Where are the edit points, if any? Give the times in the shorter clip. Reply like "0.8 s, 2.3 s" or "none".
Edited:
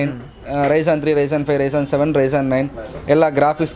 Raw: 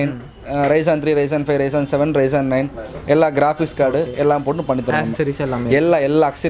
none

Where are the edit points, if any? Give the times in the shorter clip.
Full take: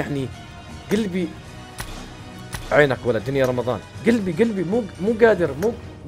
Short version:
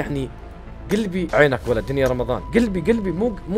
1.3 s, 2.4 s

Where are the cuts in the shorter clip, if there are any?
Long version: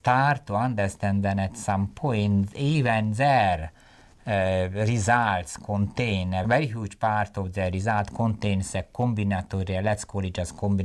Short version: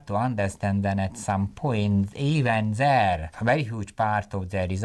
3.4 s

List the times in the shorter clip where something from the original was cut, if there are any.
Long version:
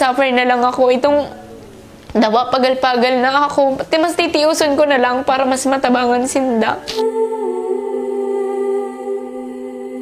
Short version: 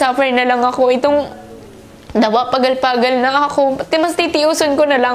none

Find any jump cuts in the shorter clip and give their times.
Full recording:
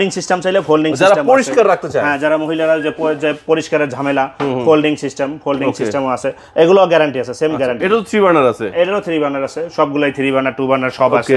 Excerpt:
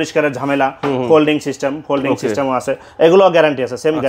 none

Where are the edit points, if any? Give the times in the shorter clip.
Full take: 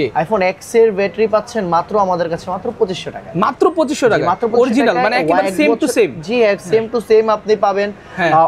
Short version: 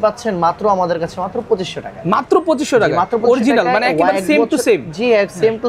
none

